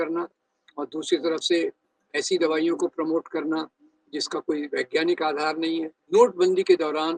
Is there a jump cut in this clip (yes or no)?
yes